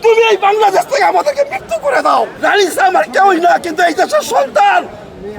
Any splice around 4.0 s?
no; 1 cut; at 2.3 s

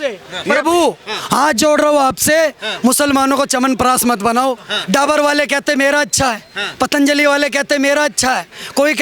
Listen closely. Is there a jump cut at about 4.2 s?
no; 0 cuts

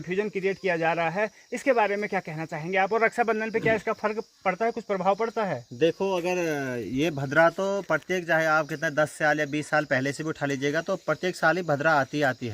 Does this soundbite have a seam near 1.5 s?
no; 0 cuts

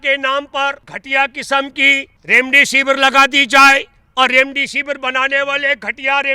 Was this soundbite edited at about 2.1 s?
yes; 2 cuts; at 0.9 s, 2.1 s

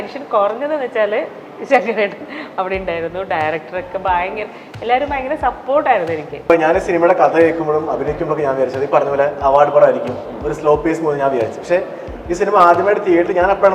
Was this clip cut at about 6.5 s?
yes; 1 cut; at 6.5 s

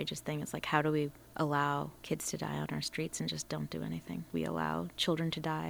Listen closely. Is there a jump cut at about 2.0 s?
yes; 2 cuts; at 2.0 s, 4.7 s

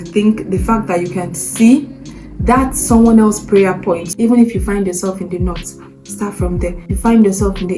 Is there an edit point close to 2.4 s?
no; 2 cuts; at 4.1 s, 6.8 s

